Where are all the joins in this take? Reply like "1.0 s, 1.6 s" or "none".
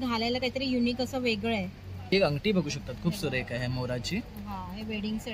2.1 s